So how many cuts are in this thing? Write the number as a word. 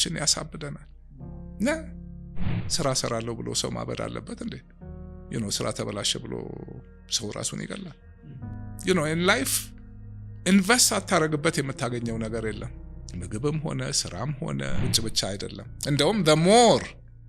two